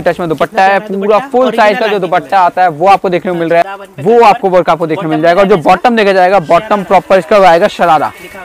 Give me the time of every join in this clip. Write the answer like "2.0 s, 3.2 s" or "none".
3.6 s